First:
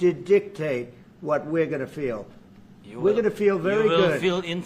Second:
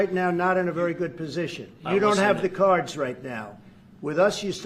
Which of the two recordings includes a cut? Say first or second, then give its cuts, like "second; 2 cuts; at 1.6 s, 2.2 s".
second; 1 cut; at 1.7 s